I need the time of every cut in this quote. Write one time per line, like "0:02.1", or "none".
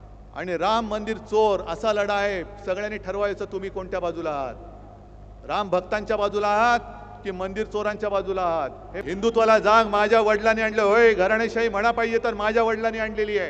0:09.0